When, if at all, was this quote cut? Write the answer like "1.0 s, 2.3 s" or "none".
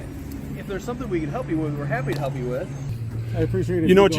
2.9 s